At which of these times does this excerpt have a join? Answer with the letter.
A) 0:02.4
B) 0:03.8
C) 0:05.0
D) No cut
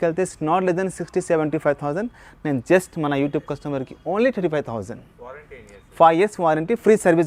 D